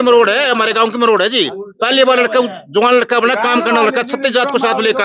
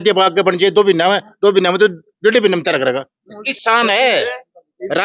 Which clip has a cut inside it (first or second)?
second